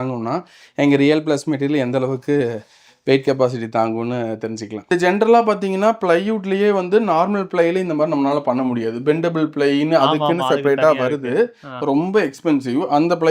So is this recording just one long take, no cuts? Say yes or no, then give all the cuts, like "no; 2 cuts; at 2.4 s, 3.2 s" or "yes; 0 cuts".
no; 1 cut; at 4.7 s